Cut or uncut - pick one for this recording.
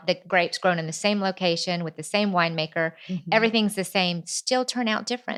uncut